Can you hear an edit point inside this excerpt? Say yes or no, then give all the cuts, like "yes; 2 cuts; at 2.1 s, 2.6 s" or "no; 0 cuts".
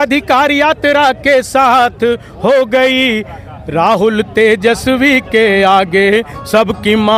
no; 0 cuts